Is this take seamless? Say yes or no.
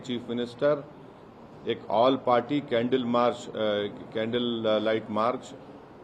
yes